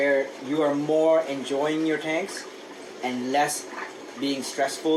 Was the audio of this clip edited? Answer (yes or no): no